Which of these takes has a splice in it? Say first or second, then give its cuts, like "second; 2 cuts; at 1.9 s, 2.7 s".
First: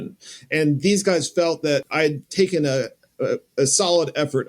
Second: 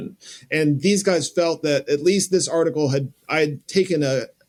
first; 1 cut; at 1.8 s